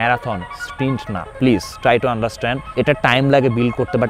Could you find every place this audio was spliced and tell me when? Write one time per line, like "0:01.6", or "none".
0:01.3
0:02.6